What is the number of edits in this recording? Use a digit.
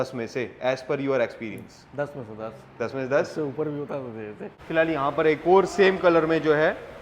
1